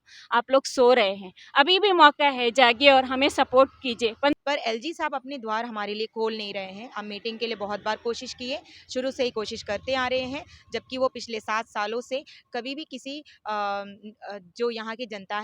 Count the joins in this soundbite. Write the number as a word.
one